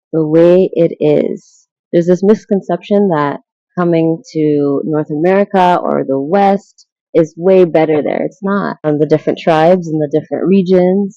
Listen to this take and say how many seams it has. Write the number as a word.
one